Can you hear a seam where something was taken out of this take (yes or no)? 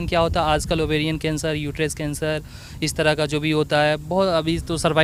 no